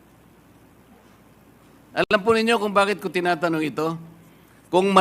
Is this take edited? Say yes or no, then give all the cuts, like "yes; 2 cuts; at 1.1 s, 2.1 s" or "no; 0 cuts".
no; 0 cuts